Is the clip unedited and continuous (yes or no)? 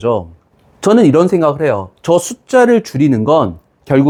yes